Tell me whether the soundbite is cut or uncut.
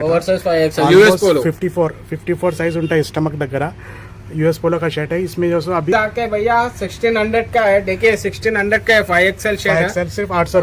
cut